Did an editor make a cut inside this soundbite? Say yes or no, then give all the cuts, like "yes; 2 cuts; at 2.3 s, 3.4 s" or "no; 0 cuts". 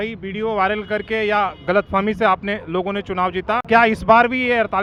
no; 0 cuts